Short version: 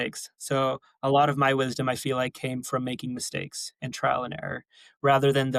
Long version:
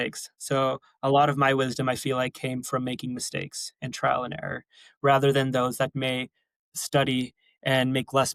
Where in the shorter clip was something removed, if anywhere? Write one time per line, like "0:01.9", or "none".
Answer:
none